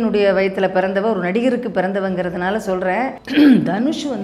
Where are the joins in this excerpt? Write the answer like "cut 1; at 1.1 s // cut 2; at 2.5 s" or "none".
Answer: cut 1; at 3.2 s